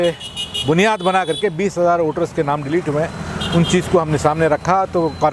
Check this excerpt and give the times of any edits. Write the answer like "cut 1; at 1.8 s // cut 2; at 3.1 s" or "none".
none